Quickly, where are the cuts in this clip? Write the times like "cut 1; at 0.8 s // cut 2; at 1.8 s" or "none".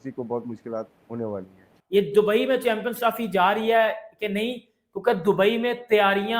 cut 1; at 1.7 s